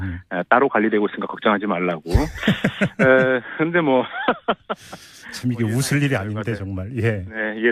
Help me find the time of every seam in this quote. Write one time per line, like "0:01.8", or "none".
none